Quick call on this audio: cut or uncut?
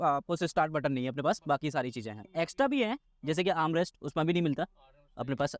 cut